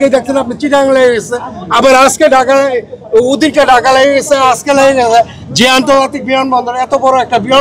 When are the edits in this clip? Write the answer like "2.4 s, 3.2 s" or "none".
none